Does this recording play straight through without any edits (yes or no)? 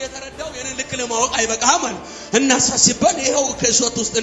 yes